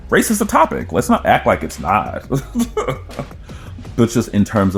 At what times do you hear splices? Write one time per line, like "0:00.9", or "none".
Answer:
none